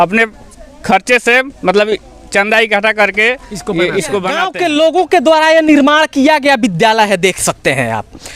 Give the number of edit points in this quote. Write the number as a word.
one